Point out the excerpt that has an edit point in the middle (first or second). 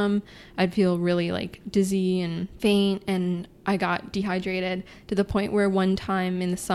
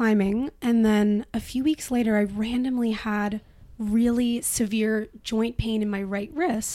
first